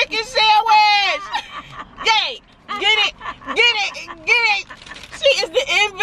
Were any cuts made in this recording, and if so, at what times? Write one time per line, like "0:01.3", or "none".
0:01.3